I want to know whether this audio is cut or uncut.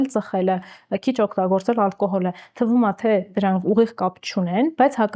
uncut